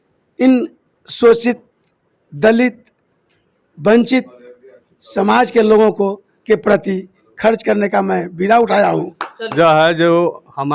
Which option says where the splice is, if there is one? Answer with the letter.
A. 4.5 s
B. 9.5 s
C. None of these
B